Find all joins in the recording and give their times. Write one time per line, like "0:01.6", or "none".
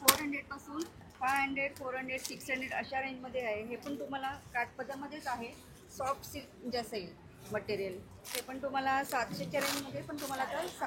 none

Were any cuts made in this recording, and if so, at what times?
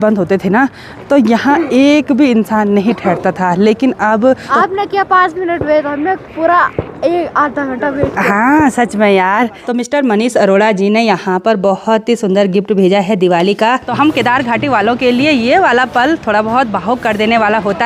0:04.5
0:09.6
0:13.9

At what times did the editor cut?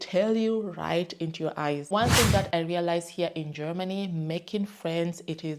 0:01.9

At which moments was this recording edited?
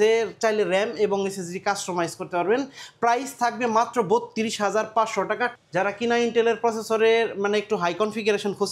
0:05.5

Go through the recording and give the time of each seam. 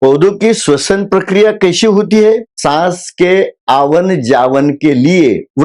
0:02.5

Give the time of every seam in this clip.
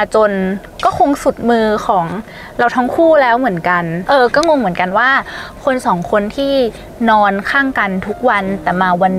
0:03.9

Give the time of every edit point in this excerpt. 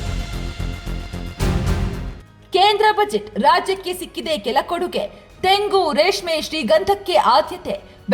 none

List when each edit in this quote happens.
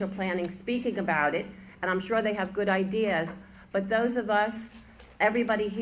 none

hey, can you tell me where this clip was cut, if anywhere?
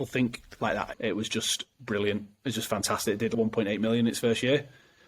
0:00.9

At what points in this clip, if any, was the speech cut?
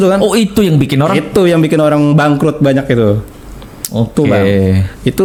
none

